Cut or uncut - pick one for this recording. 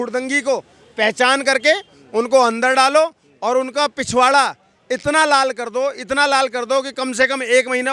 uncut